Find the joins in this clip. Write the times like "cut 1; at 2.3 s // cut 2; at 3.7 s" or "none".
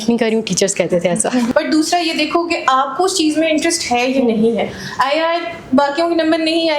cut 1; at 1.5 s